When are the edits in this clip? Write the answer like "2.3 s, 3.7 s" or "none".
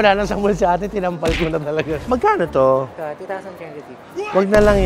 2.0 s